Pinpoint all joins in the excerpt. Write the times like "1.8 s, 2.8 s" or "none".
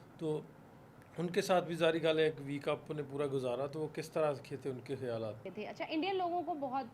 5.4 s